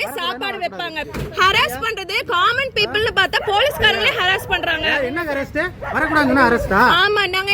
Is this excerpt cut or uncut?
cut